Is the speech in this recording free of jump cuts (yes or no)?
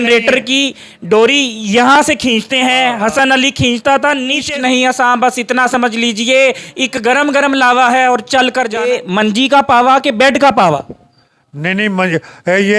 no